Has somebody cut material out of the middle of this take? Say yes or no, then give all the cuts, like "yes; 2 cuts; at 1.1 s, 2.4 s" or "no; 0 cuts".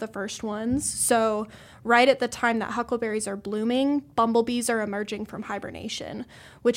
no; 0 cuts